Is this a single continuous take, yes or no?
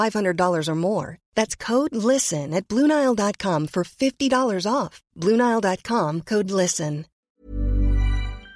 no